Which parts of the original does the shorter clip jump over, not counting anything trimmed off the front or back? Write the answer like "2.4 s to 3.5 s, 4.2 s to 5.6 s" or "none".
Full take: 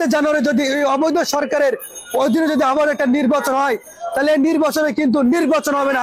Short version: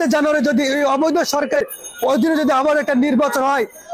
1.6 s to 1.7 s